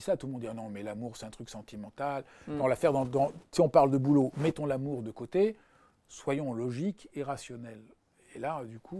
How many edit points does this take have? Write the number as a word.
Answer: zero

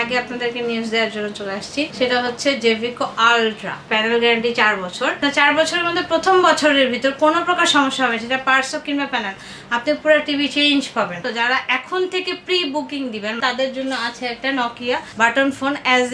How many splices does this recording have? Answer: six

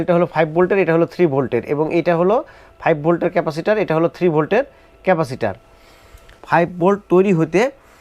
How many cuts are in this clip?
one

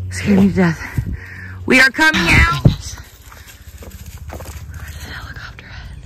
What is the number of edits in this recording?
one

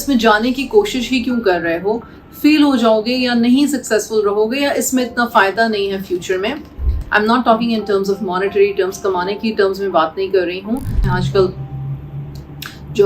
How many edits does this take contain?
one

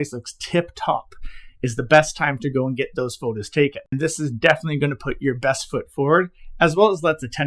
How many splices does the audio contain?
one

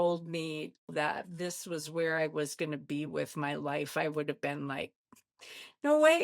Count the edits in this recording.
one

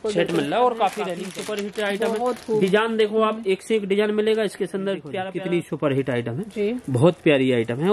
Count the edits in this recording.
two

